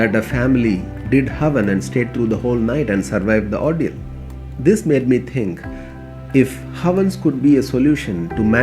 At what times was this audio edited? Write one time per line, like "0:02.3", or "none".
none